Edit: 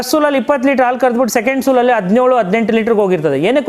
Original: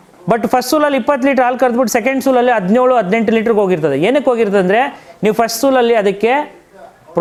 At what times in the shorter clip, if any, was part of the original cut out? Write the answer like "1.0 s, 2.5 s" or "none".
none